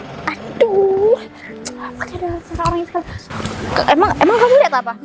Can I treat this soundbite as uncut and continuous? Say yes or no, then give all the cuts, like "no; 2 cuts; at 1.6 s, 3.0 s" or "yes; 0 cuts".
no; 1 cut; at 3.2 s